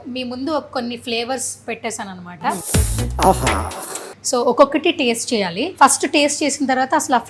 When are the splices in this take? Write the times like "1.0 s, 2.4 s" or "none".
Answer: 2.6 s, 4.1 s, 5.6 s